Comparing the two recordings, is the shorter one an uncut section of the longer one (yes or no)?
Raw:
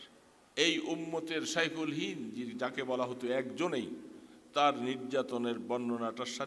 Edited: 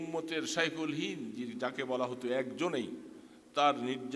yes